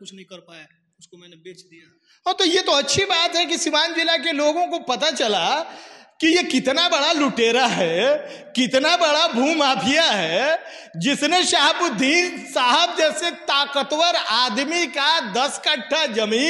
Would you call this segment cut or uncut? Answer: uncut